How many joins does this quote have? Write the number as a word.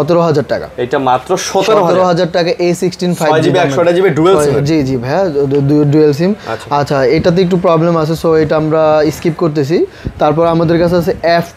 zero